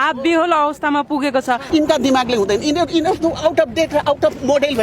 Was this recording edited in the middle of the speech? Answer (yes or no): yes